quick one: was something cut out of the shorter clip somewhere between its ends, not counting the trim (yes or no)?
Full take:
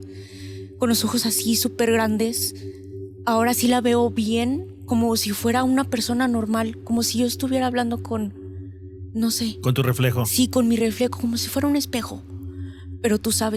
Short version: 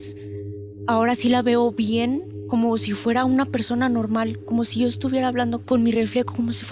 yes